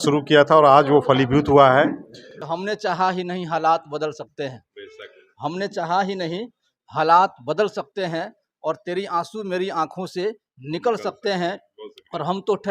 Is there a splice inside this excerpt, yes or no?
yes